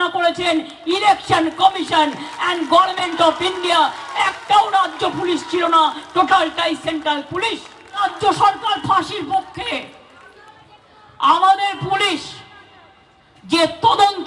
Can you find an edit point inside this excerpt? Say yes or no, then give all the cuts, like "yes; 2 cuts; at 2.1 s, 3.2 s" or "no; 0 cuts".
yes; 1 cut; at 8.0 s